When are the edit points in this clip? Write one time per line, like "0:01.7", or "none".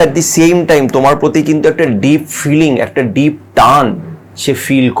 none

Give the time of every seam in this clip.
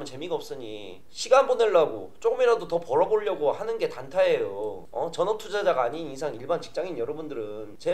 0:04.8

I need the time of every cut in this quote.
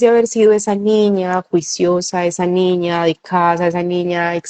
none

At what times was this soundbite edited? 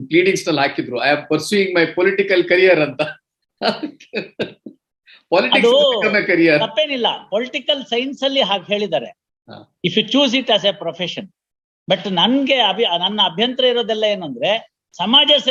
none

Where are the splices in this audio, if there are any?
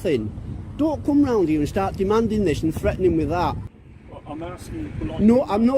0:03.7

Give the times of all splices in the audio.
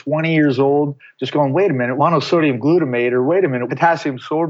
0:01.9
0:03.6

